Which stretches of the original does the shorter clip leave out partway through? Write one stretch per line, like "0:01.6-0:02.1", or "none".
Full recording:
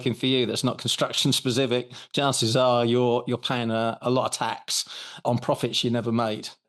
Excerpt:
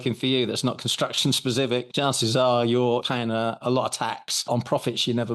0:01.9-0:02.1
0:03.2-0:03.4
0:04.7-0:05.1